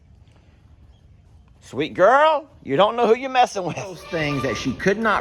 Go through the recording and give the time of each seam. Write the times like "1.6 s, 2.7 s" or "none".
4.0 s